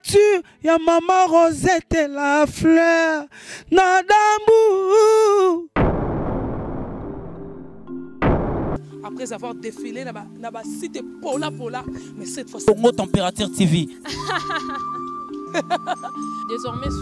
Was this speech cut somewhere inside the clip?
no; 0 cuts

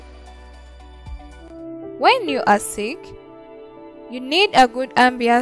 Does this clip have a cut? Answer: yes; 1 cut; at 1.6 s

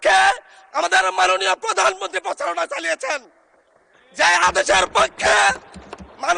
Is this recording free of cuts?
yes; 0 cuts

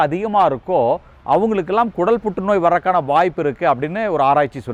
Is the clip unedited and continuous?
yes; 0 cuts

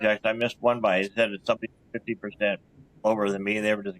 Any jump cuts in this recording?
no; 0 cuts

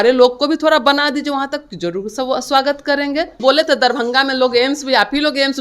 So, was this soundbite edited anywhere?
yes; 1 cut; at 3.4 s

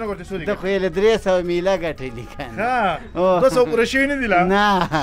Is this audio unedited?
yes; 0 cuts

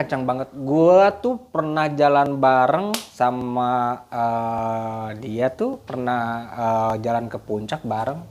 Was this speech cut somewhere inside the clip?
no; 0 cuts

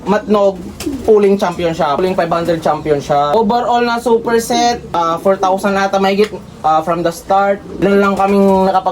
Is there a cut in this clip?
yes; 4 cuts; at 2.0 s, 3.3 s, 4.9 s, 7.8 s

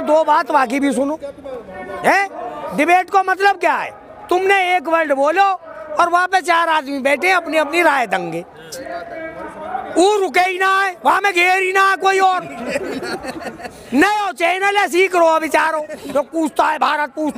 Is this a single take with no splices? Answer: no; 1 cut; at 16.0 s

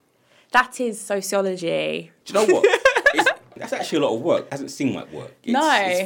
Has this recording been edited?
yes; 3 cuts; at 2.1 s, 3.5 s, 4.5 s

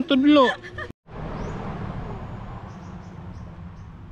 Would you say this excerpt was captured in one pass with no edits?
no; 1 cut; at 0.9 s

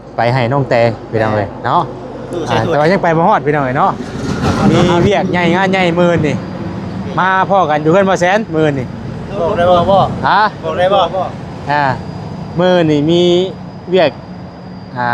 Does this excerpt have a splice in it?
yes; 1 cut; at 4.6 s

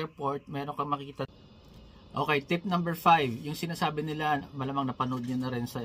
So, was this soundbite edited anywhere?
yes; 1 cut; at 1.3 s

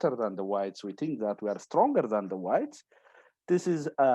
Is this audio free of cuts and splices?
yes; 0 cuts

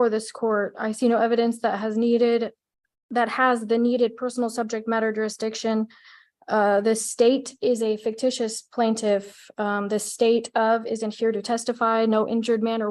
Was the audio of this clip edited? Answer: no; 0 cuts

